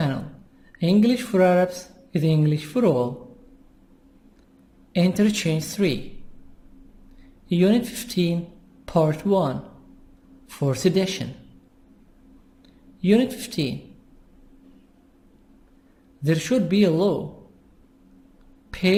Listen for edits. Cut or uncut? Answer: uncut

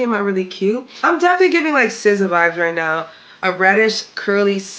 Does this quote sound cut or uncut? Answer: cut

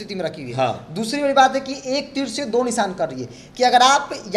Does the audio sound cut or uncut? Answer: uncut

